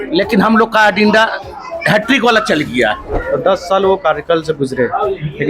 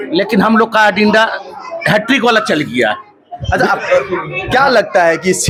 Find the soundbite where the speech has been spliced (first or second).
first